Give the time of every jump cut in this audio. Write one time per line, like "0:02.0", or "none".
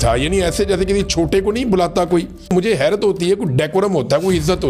0:02.5